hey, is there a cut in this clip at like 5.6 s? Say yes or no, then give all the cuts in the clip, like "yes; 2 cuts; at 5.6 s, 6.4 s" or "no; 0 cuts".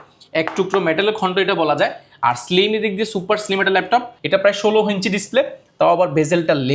no; 1 cut; at 4.2 s